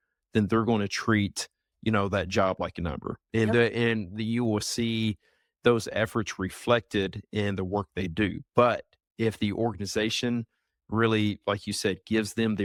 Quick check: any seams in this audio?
no; 0 cuts

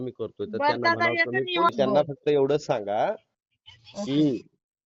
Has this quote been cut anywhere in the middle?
yes; 1 cut; at 1.7 s

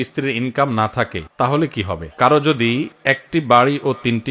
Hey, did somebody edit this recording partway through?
yes; 1 cut; at 2.0 s

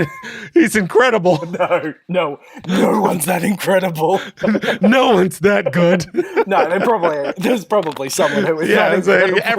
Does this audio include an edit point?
yes; 1 cut; at 1.5 s

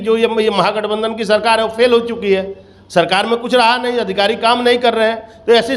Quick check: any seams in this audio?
no; 0 cuts

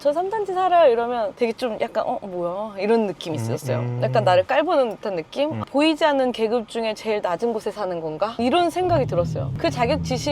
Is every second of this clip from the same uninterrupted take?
no; 2 cuts; at 1.3 s, 5.6 s

